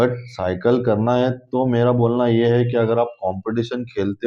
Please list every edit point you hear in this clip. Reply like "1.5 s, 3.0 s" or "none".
none